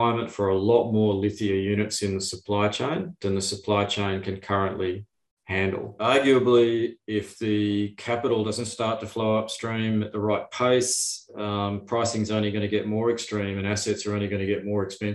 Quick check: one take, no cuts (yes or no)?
no